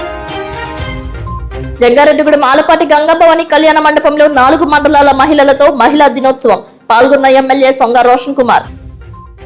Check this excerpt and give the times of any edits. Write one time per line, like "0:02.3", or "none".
0:01.7